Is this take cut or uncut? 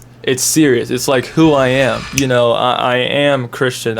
cut